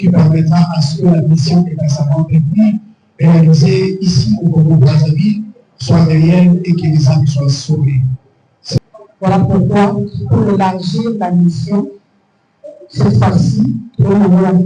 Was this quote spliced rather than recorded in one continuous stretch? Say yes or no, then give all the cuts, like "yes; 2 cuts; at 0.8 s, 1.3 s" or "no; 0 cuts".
yes; 1 cut; at 8.8 s